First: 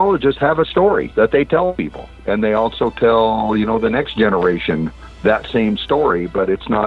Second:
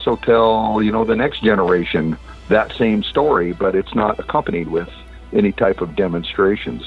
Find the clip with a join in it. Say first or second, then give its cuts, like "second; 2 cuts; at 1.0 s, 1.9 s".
first; 2 cuts; at 1.1 s, 1.8 s